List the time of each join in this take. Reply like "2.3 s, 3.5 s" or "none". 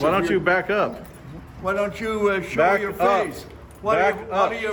none